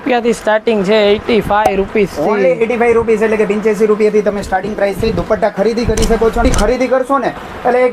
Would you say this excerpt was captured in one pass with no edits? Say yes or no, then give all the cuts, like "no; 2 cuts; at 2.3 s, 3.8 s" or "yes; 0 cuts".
no; 1 cut; at 6.4 s